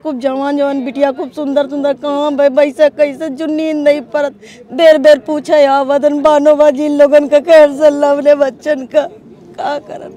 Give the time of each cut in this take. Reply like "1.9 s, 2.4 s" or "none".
none